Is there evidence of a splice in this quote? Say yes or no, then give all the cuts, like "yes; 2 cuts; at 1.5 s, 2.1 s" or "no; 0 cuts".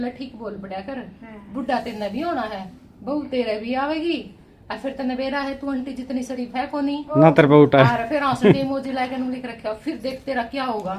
no; 0 cuts